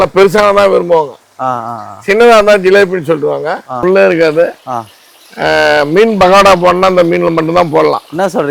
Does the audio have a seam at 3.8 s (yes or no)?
yes